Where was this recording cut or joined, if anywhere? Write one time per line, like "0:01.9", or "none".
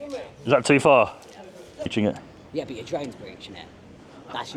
0:01.9